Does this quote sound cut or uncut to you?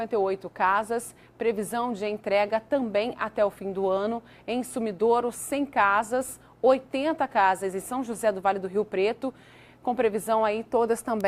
uncut